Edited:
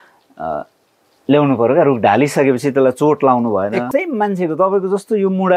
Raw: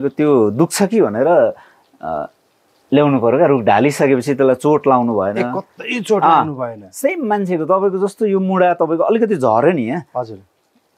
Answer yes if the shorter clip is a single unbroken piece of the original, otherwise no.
no